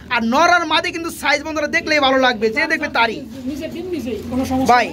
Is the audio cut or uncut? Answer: uncut